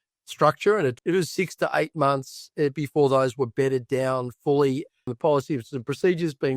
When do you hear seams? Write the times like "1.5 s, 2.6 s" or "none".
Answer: 1.0 s, 5.1 s